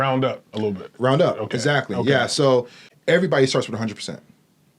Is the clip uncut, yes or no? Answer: no